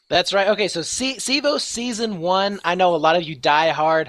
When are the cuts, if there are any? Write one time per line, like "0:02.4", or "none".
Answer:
0:01.7